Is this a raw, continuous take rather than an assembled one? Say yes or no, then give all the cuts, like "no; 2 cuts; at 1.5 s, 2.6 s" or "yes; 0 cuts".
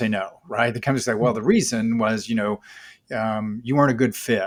yes; 0 cuts